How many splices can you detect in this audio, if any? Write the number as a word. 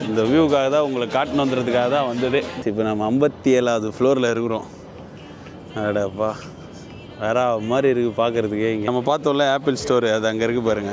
two